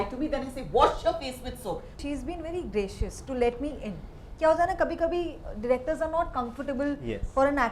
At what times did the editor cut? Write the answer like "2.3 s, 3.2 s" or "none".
2.0 s